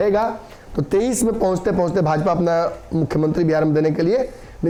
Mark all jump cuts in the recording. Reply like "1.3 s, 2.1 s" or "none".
none

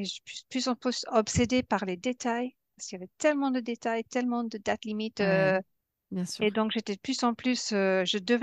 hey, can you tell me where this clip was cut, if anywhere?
5.8 s

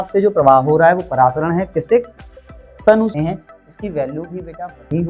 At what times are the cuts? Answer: 3.1 s

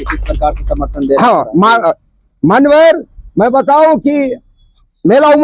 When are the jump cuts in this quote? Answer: none

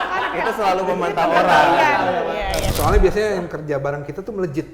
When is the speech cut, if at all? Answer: 2.7 s

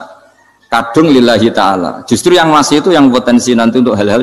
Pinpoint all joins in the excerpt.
none

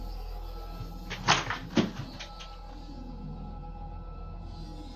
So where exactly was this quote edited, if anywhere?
none

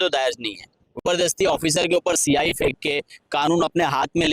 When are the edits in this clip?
1.0 s

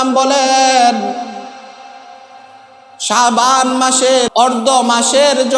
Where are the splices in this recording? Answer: 4.3 s

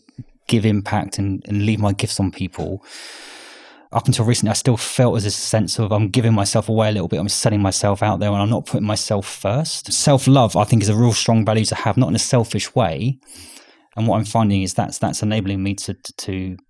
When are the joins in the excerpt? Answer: 3.9 s, 10.0 s

